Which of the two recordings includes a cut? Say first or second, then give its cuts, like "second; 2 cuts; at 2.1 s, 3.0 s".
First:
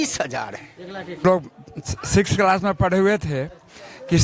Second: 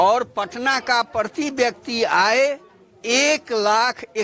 first; 1 cut; at 1.2 s